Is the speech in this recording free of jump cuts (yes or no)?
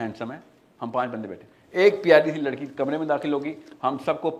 yes